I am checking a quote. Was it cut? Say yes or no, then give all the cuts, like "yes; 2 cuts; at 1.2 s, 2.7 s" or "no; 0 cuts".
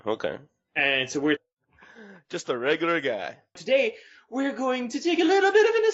no; 0 cuts